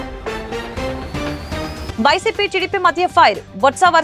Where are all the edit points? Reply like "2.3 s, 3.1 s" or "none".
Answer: none